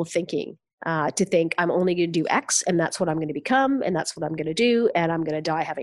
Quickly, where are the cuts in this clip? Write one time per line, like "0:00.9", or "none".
none